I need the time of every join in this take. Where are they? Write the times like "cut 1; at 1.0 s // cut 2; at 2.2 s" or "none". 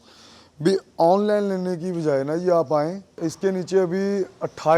cut 1; at 3.1 s